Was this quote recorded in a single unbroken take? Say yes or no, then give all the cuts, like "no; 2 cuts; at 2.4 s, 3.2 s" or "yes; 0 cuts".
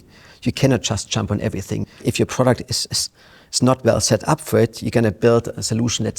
no; 1 cut; at 1.9 s